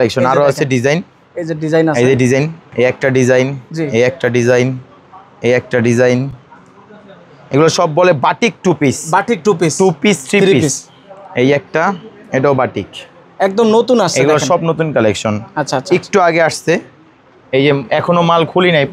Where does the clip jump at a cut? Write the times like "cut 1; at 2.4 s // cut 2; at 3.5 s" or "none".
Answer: none